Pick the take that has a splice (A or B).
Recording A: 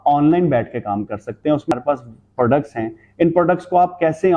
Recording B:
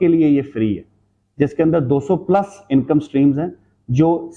A